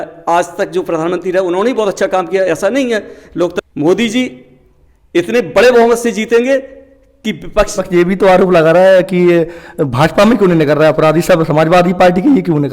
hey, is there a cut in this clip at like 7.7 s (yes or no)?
yes